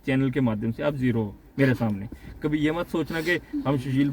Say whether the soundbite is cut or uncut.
uncut